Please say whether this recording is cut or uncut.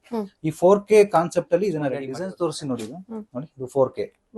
cut